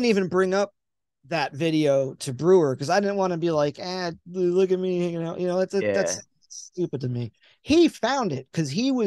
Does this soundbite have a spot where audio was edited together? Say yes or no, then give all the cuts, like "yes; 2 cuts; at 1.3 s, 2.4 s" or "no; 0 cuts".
no; 0 cuts